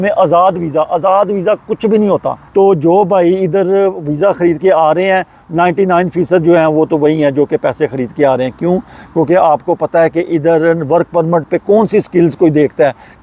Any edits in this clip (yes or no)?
yes